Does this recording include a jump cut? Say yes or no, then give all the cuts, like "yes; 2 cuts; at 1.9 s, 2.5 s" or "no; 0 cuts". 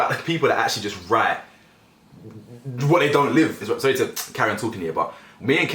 no; 0 cuts